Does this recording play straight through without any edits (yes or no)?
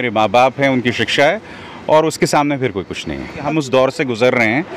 no